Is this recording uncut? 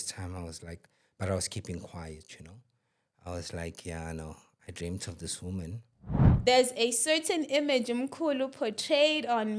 no; 1 cut; at 6.3 s

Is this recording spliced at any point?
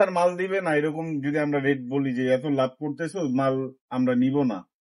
no; 0 cuts

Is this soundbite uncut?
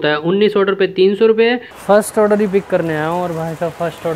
no; 1 cut; at 1.7 s

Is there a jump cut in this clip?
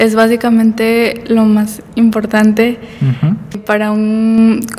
yes; 1 cut; at 3.6 s

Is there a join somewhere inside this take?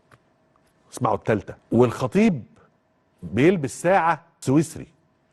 yes; 2 cuts; at 1.6 s, 4.3 s

